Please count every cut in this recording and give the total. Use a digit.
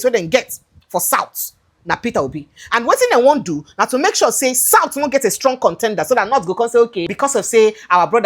1